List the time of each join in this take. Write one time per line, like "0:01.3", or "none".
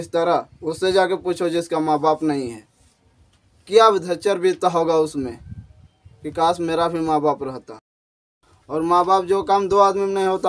0:08.3